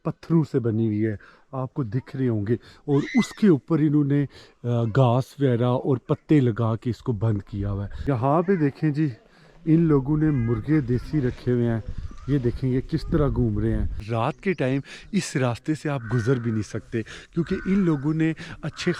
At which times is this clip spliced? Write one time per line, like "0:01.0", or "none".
0:08.0
0:14.1